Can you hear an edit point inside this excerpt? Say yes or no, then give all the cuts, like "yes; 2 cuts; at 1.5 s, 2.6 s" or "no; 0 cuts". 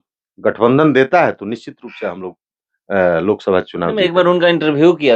no; 0 cuts